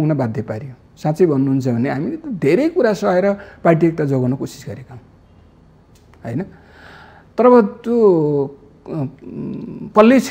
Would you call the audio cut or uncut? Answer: uncut